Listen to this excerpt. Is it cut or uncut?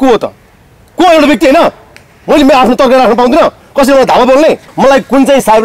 cut